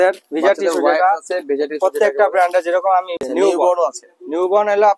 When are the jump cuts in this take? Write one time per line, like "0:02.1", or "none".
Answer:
0:03.2